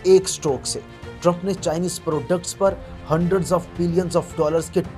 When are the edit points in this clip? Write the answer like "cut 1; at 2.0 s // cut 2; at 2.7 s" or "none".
none